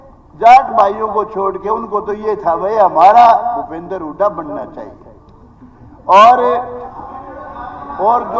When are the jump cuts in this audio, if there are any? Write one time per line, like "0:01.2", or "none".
none

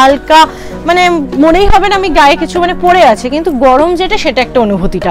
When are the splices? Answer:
none

